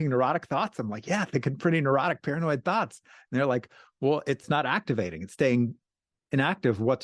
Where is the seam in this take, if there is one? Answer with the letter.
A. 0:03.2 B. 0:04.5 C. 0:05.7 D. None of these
B